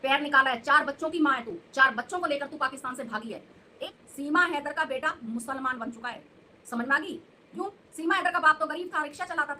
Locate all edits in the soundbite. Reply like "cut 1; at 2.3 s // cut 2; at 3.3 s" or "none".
cut 1; at 4.0 s // cut 2; at 7.4 s